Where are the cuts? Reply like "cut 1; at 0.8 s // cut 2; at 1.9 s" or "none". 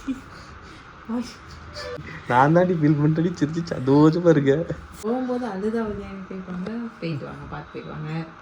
cut 1; at 2.1 s // cut 2; at 4.9 s